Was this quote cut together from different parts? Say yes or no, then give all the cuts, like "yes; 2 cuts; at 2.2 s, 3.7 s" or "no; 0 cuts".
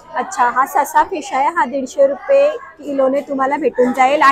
no; 0 cuts